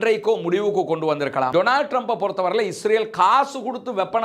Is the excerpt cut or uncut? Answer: cut